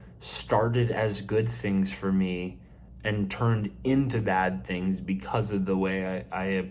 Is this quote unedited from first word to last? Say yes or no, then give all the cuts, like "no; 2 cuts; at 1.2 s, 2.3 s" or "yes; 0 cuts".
yes; 0 cuts